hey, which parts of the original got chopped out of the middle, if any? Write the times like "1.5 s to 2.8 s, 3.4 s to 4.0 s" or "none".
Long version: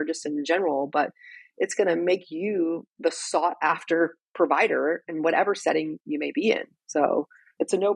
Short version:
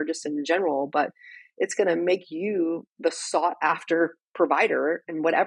none

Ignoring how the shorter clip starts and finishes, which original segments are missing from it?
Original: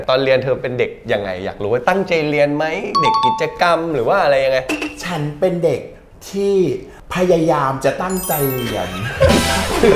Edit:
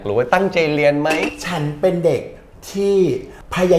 2.8 s to 4.8 s

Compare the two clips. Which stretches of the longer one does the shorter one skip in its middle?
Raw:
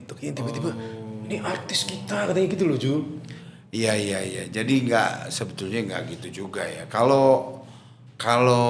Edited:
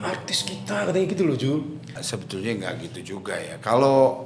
3.4 s to 5.3 s

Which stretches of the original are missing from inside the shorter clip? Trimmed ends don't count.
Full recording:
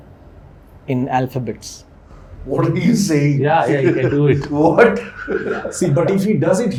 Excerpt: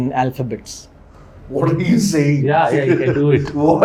none

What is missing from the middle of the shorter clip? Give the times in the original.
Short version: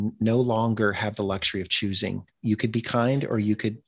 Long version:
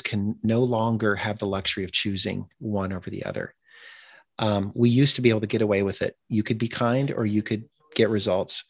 2.6 s to 6.2 s

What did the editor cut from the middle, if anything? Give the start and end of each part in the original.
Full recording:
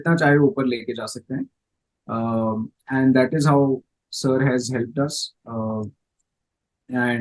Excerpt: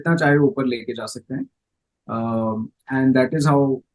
none

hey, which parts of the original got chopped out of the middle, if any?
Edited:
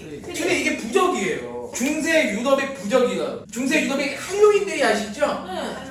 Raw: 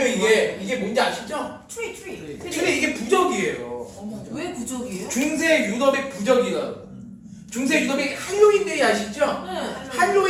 3.9 s to 5.0 s, 6.8 s to 7.4 s

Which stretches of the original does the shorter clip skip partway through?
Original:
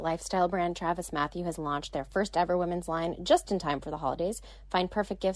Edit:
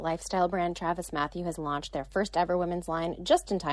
none

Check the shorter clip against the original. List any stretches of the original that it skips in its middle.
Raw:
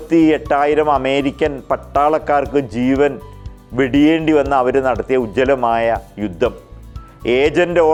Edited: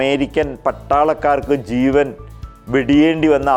none

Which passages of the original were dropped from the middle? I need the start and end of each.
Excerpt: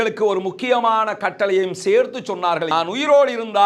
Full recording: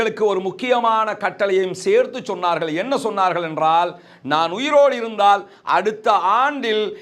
2.7 s to 4.3 s

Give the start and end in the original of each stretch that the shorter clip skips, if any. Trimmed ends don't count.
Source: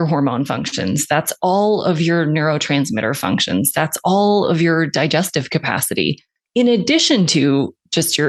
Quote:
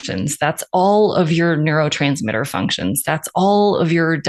none

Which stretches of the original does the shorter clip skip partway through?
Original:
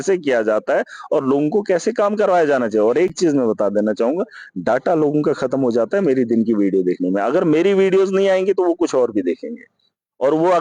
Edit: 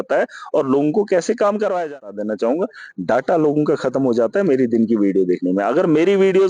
2.6 s to 3.6 s

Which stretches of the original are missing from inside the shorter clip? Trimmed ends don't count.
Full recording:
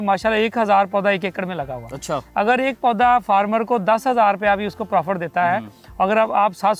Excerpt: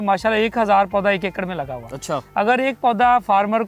none

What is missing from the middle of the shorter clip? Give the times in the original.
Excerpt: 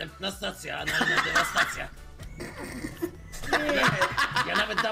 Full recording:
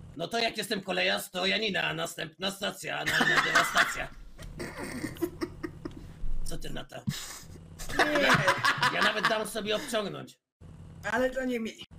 5.3 s to 7.6 s

